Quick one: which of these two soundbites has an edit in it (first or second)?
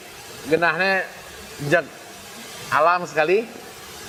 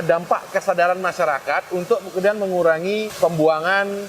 second